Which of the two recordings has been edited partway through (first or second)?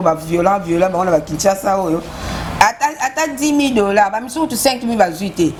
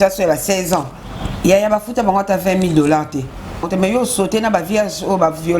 second